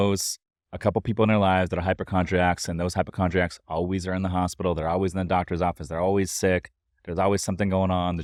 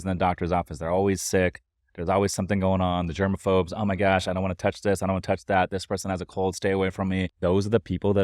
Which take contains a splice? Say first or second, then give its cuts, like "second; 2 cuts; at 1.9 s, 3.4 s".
second; 1 cut; at 7.3 s